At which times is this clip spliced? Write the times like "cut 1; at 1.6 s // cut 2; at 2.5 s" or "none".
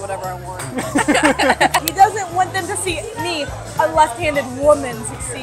cut 1; at 1.8 s